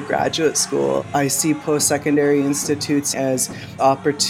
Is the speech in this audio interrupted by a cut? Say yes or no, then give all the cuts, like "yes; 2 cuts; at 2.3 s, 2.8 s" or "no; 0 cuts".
yes; 2 cuts; at 1.0 s, 3.1 s